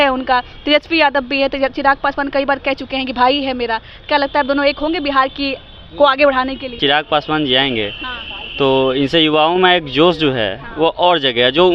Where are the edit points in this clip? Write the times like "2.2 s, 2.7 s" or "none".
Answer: 6.8 s